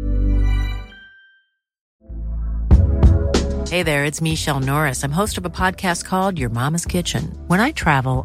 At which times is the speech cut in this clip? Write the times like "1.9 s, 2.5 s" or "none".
1.8 s